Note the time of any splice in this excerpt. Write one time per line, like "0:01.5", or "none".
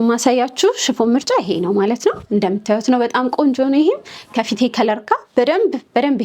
none